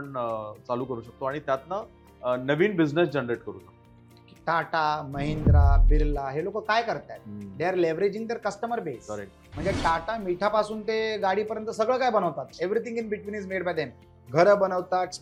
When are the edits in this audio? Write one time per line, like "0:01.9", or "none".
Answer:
none